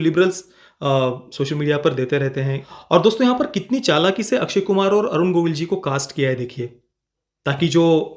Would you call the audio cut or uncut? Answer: cut